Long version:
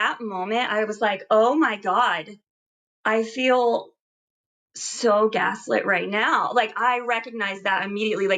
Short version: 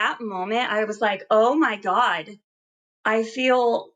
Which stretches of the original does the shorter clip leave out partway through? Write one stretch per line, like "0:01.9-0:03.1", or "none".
none